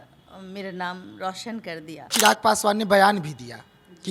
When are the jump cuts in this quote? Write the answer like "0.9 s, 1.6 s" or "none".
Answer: 2.1 s